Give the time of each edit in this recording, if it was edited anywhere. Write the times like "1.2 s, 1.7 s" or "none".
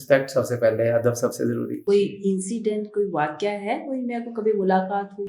1.8 s